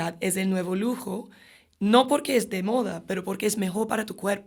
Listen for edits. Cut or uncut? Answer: uncut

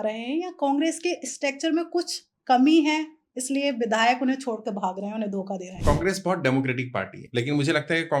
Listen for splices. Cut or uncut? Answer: cut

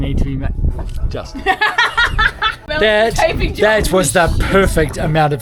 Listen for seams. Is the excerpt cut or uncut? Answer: cut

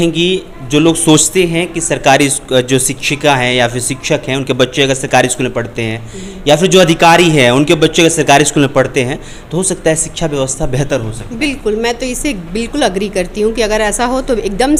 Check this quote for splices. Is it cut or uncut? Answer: uncut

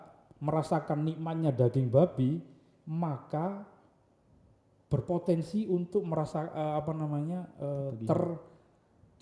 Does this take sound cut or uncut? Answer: uncut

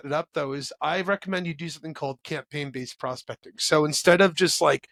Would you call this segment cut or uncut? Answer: uncut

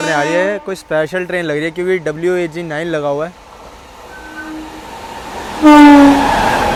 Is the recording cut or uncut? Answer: uncut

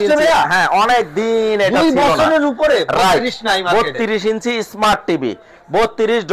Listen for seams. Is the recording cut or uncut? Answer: uncut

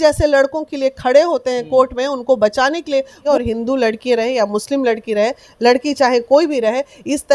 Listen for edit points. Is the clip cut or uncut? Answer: cut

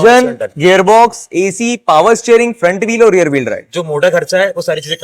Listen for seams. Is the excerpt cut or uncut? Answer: uncut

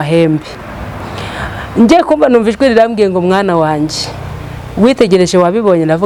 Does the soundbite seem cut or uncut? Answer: uncut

